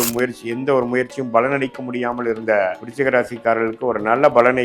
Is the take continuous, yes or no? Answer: no